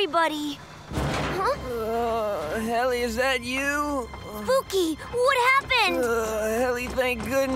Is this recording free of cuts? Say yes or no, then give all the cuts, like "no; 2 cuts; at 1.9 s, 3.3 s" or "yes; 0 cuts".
yes; 0 cuts